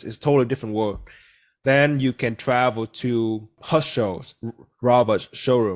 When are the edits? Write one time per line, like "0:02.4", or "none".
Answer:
0:03.6